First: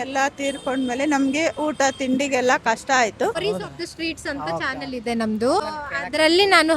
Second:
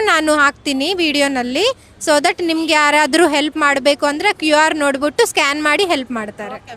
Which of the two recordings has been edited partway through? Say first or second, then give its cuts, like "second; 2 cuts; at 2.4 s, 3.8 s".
first; 2 cuts; at 3.4 s, 5.6 s